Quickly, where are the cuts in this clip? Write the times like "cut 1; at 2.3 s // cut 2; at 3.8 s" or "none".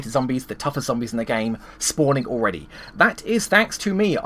none